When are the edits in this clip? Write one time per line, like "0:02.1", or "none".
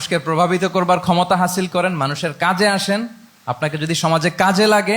none